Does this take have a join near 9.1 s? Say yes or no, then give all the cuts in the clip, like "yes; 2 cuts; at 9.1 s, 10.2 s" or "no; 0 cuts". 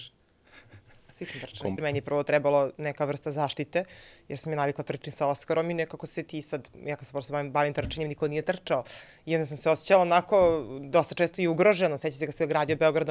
no; 1 cut; at 1.8 s